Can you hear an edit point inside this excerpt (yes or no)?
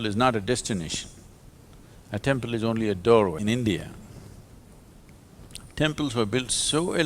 yes